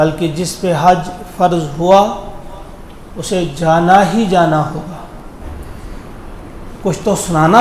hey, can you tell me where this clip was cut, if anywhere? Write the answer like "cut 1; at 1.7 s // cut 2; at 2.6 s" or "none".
cut 1; at 5.5 s